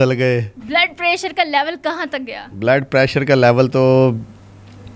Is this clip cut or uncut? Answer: uncut